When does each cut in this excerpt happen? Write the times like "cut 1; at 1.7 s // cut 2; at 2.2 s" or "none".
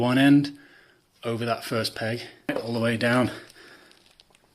cut 1; at 2.5 s